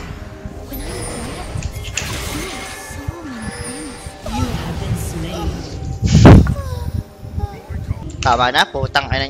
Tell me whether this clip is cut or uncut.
cut